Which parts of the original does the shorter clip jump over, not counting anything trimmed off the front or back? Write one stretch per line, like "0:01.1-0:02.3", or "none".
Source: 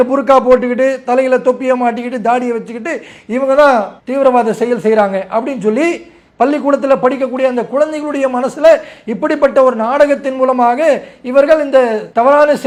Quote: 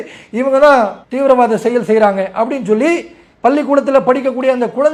none